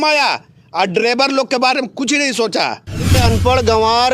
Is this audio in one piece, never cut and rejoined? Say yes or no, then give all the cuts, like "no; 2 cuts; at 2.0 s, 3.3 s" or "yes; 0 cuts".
no; 1 cut; at 3.2 s